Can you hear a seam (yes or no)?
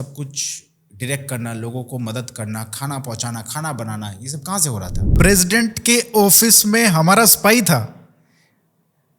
yes